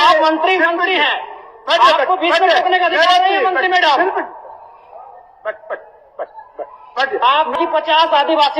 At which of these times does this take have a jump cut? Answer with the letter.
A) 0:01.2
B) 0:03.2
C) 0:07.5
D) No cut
C